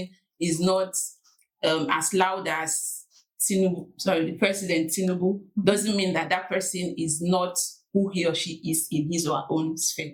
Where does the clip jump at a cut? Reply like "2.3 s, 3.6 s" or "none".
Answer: none